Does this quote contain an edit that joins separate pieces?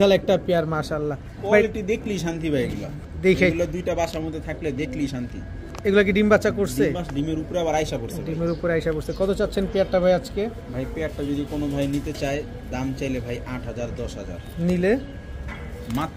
no; 0 cuts

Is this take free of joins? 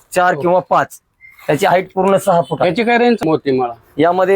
no; 1 cut; at 3.2 s

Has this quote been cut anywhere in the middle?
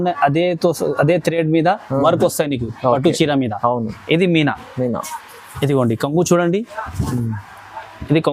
no; 0 cuts

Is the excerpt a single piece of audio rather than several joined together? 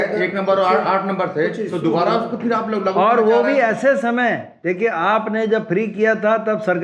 yes; 0 cuts

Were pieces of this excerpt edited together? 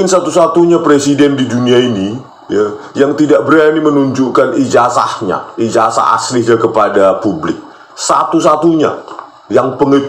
no; 0 cuts

